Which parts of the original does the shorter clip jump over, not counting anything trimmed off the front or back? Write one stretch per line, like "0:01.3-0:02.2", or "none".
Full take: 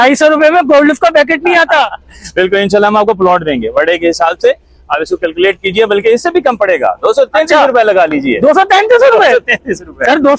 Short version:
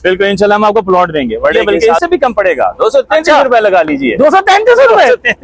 0:03.9-0:05.8